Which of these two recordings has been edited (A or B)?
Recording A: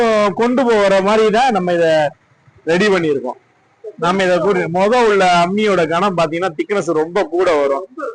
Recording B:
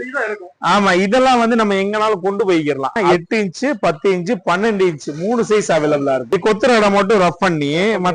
B